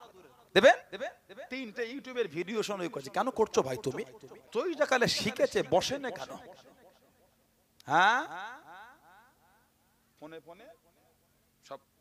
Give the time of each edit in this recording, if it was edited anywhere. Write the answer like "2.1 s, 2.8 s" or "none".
4.5 s